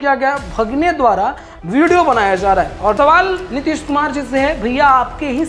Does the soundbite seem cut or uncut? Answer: cut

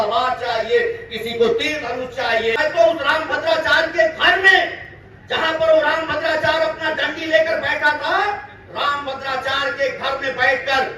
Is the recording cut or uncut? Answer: cut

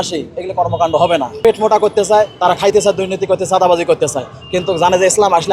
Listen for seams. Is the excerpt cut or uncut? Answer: cut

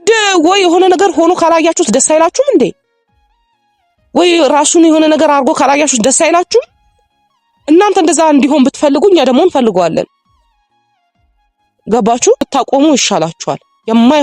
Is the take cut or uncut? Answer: cut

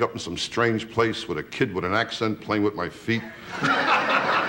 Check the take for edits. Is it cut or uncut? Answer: uncut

